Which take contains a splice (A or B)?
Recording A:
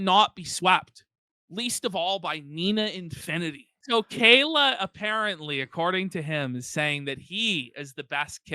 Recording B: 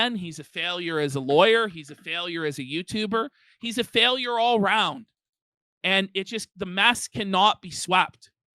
A